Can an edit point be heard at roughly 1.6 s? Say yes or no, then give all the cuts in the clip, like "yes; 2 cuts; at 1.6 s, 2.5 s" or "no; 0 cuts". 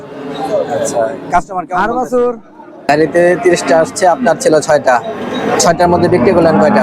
no; 1 cut; at 2.9 s